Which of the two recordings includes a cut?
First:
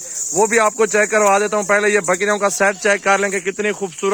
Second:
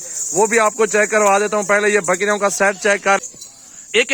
second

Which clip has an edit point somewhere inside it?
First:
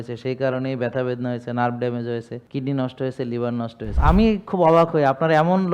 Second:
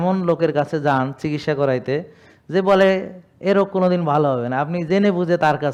first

